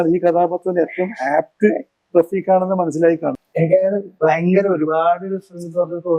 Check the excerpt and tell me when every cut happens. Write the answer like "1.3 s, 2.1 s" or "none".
3.3 s